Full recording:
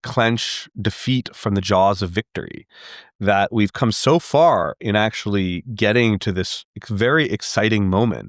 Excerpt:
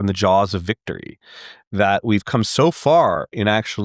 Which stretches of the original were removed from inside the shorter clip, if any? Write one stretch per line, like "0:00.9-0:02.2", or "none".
none